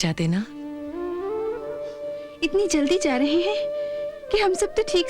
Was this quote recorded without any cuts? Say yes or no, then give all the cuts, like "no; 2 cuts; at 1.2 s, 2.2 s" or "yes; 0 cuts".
yes; 0 cuts